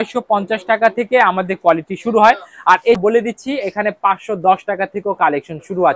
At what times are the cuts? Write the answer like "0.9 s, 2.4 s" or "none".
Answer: 3.0 s